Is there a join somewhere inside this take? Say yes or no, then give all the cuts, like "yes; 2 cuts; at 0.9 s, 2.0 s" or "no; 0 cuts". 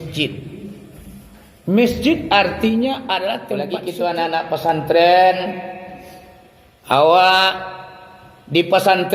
yes; 1 cut; at 3.6 s